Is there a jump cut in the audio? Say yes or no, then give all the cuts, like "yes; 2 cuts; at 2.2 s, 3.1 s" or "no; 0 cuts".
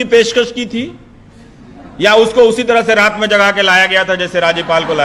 no; 0 cuts